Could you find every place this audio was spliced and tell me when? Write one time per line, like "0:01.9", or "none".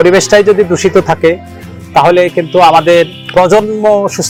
none